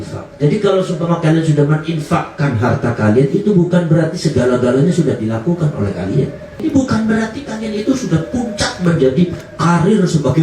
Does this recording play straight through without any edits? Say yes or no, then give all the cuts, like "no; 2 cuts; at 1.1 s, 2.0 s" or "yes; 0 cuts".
no; 1 cut; at 6.6 s